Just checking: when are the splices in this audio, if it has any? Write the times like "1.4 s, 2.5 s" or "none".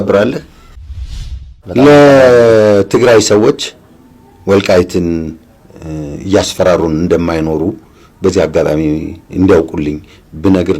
1.1 s